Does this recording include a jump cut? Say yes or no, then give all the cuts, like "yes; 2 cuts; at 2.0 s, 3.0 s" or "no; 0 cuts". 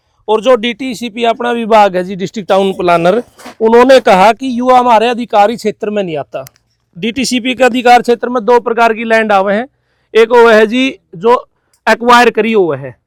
no; 0 cuts